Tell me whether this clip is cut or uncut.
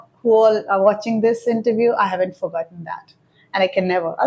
uncut